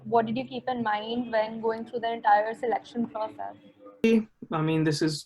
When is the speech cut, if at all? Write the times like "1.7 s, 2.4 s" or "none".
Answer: 4.0 s